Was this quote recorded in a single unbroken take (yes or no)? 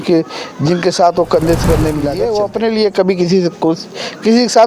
no